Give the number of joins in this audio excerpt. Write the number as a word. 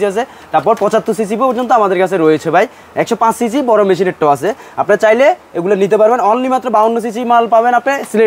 zero